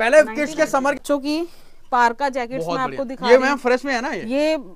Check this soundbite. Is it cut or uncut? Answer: uncut